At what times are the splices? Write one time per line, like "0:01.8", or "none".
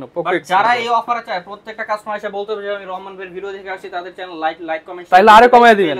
none